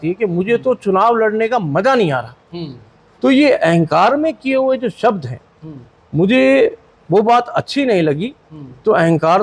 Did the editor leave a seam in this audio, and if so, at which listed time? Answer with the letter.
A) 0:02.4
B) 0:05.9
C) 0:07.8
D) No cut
D